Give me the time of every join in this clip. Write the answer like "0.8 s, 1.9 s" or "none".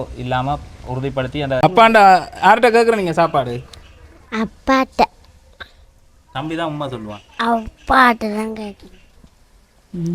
1.6 s